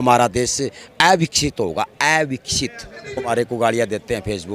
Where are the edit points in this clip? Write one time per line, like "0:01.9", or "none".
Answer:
0:03.3